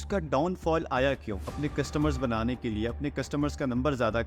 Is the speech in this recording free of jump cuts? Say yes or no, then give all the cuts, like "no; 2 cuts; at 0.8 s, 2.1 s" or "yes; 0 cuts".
no; 1 cut; at 1.5 s